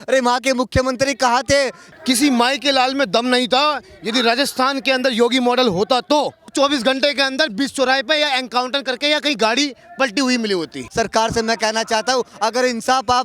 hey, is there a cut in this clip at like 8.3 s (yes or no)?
no